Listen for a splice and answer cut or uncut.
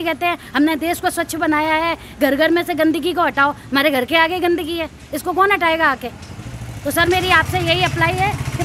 uncut